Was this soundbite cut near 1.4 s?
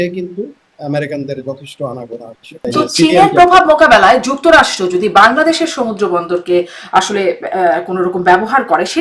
no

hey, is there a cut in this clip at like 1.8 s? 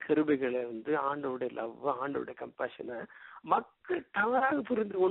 no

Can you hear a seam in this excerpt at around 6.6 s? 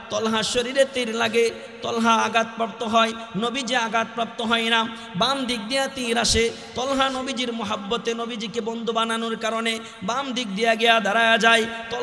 no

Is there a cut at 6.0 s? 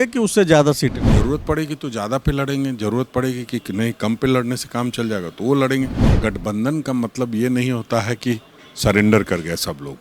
yes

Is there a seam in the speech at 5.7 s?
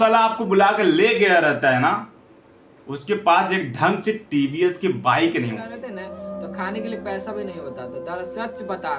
yes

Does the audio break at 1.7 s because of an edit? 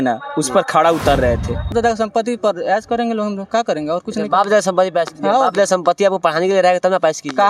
yes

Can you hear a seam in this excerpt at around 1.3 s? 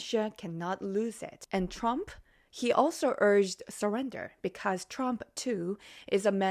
yes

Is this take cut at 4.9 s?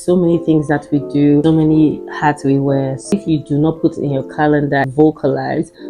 yes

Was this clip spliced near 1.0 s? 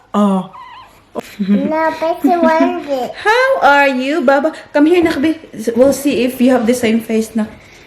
yes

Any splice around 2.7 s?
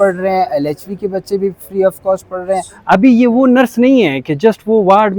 yes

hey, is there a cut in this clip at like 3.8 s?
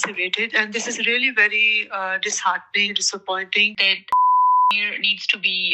yes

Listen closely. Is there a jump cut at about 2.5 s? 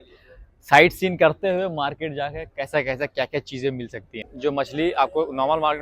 no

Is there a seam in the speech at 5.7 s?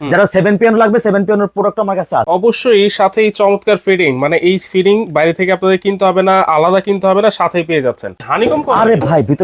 no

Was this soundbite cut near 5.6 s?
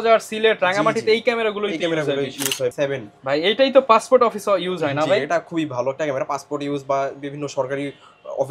no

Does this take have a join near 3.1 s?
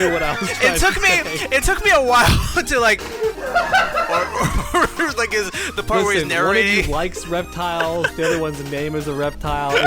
yes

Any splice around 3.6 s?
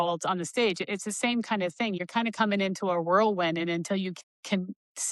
no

